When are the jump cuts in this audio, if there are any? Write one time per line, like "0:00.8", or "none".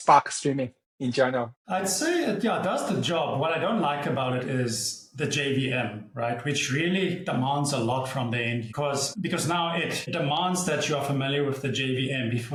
none